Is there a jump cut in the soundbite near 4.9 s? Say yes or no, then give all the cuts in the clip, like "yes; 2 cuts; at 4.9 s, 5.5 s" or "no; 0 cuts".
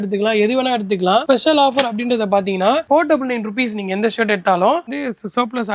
yes; 3 cuts; at 1.2 s, 2.8 s, 4.9 s